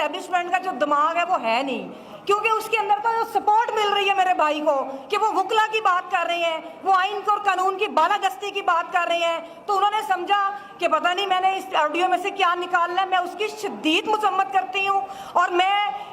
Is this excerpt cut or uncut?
uncut